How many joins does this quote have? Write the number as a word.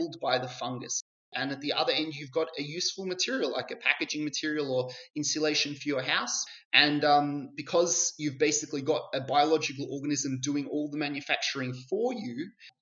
one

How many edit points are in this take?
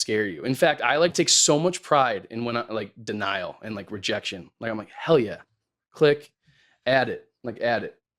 one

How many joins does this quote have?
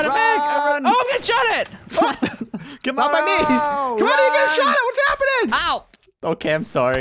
one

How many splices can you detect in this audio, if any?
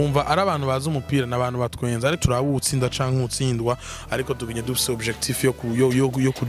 one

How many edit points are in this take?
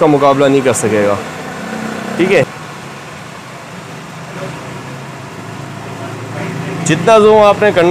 one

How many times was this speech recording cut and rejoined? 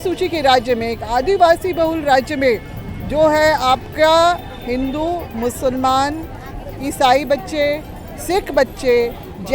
zero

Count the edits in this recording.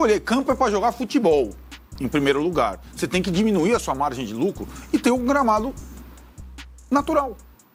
zero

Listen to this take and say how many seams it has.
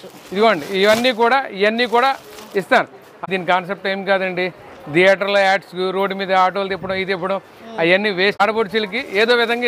two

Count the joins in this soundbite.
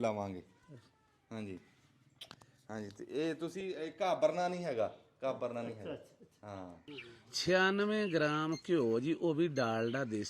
one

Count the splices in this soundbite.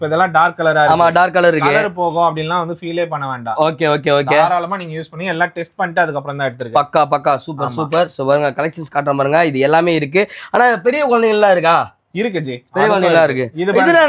zero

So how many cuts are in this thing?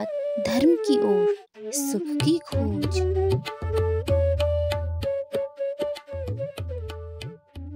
zero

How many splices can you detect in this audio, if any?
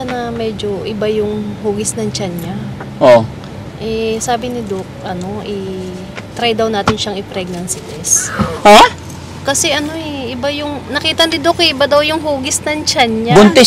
zero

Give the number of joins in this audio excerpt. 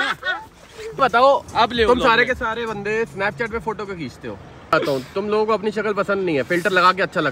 two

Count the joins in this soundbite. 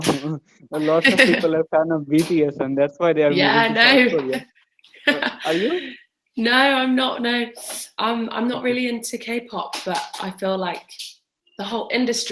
zero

